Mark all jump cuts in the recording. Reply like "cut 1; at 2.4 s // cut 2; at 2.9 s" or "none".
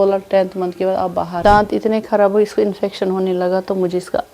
cut 1; at 1.4 s